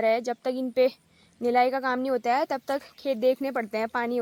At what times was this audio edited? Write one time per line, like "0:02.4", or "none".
none